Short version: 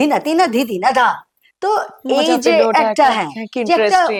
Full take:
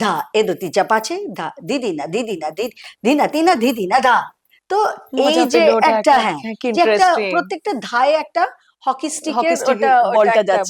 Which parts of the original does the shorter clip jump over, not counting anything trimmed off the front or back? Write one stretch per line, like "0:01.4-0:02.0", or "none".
none